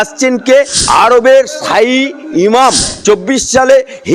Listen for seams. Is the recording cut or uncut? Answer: cut